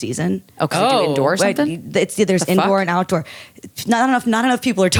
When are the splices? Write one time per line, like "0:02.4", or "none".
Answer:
none